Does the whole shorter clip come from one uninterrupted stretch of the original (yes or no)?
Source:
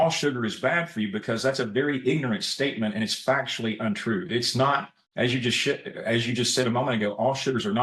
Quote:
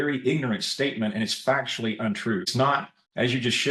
no